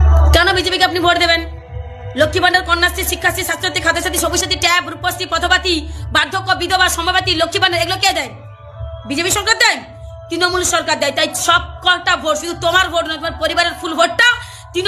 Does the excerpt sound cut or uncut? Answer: uncut